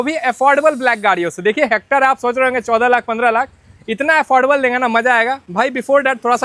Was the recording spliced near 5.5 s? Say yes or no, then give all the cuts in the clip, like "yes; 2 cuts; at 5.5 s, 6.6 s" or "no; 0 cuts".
no; 0 cuts